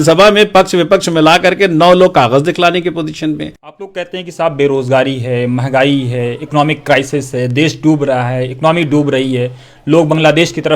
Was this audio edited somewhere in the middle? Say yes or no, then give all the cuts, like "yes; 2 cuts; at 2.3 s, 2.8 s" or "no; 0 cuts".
yes; 1 cut; at 3.9 s